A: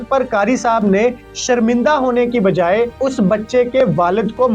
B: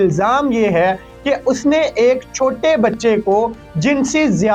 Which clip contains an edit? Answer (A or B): A